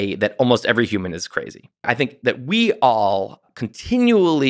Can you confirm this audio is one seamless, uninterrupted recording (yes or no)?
no